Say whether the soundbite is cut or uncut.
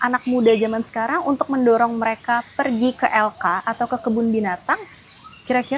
uncut